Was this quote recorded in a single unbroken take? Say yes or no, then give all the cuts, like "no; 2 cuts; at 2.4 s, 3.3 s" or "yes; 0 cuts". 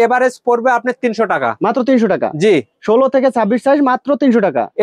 yes; 0 cuts